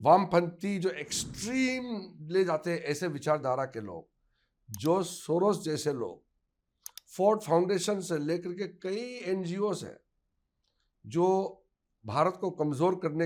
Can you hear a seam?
no; 0 cuts

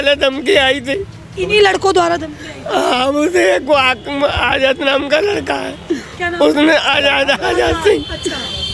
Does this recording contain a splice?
no; 0 cuts

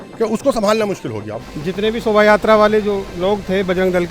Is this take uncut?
no; 2 cuts; at 1.3 s, 3.1 s

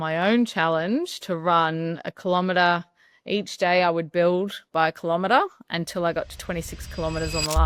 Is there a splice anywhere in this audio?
no; 0 cuts

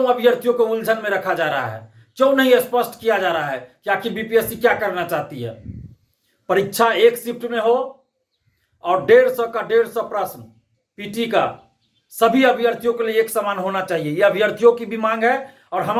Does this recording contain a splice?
no; 0 cuts

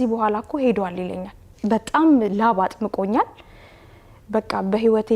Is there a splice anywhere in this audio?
yes; 1 cut; at 1.5 s

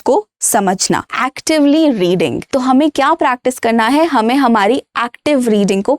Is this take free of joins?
no; 2 cuts; at 1.1 s, 2.4 s

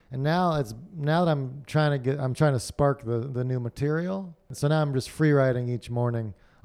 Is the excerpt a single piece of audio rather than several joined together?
no; 1 cut; at 4.5 s

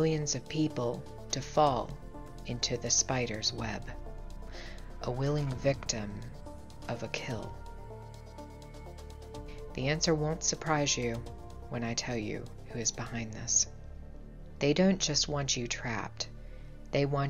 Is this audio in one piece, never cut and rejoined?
yes; 0 cuts

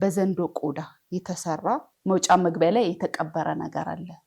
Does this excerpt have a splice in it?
yes; 1 cut; at 1.9 s

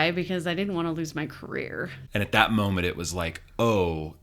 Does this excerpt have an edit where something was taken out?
yes; 1 cut; at 2.0 s

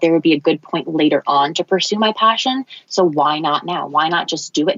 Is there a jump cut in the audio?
no; 0 cuts

